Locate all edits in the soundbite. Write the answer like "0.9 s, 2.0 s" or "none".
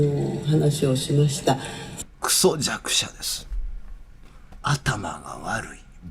1.8 s, 4.5 s